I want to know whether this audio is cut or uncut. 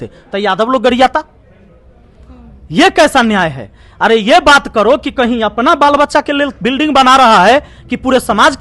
uncut